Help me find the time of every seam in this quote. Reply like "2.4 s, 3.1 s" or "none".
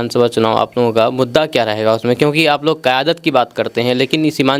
none

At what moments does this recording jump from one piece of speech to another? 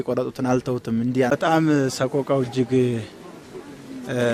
1.3 s

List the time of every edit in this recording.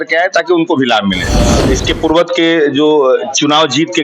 1.6 s

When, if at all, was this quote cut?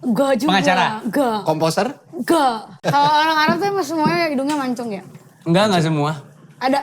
2.8 s

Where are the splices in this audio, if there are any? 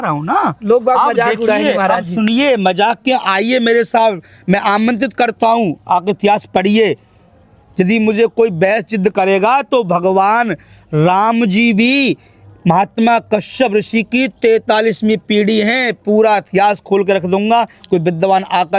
none

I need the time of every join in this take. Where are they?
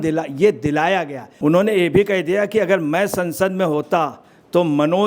1.4 s

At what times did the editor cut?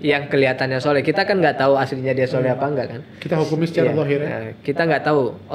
none

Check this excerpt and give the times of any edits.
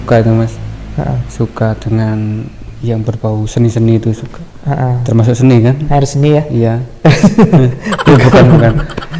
none

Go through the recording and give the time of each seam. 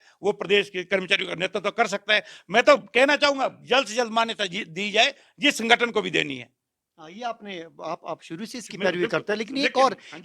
none

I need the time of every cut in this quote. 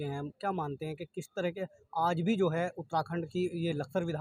none

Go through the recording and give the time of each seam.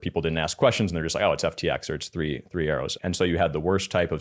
2.9 s

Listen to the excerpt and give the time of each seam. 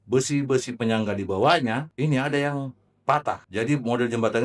1.9 s, 3.4 s

